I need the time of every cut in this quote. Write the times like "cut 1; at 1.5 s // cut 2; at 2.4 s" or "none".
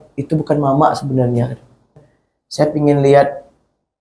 cut 1; at 1.9 s